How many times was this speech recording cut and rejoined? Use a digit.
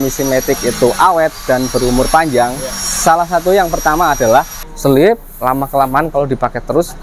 1